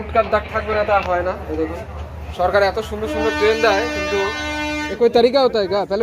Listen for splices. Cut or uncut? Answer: cut